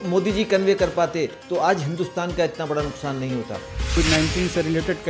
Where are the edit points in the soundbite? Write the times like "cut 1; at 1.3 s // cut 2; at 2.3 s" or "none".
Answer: cut 1; at 3.9 s